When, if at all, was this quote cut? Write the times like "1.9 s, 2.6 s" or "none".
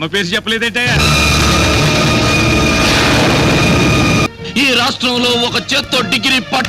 4.2 s